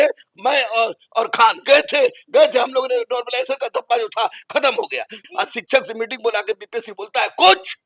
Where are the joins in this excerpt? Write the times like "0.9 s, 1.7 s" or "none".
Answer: 5.2 s